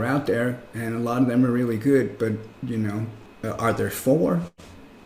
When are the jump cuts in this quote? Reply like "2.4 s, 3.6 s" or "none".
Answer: 3.2 s